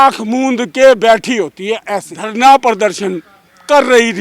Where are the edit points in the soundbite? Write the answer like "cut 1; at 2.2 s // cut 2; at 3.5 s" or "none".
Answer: cut 1; at 2.2 s